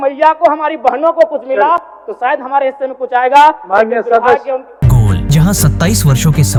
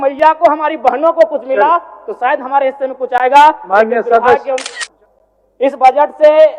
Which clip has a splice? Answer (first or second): second